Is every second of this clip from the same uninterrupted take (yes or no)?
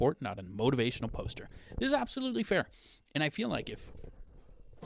yes